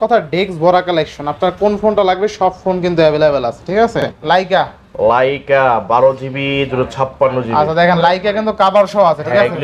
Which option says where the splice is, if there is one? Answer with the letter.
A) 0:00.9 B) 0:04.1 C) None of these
B